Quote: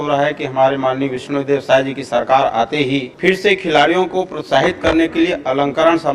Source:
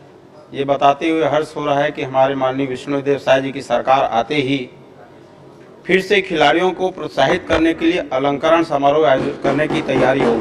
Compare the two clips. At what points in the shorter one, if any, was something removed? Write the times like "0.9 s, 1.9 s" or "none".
3.1 s